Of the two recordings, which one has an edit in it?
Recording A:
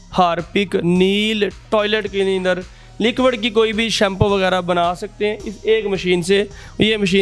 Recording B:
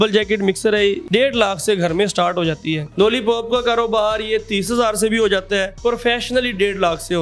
B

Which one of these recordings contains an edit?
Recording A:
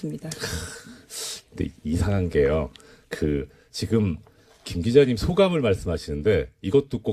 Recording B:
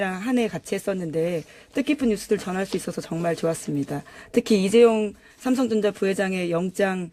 B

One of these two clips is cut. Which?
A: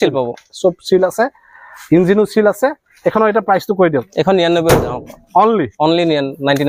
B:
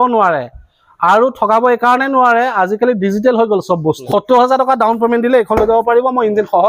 B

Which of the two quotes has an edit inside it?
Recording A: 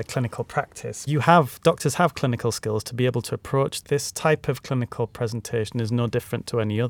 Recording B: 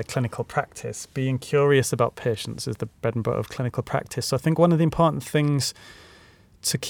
A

